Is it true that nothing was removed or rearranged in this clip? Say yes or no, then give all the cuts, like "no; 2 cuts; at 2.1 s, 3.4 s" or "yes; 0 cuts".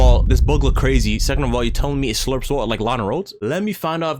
yes; 0 cuts